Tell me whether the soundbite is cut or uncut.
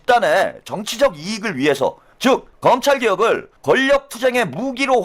cut